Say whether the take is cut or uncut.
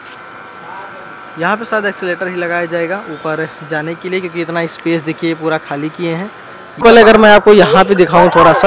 cut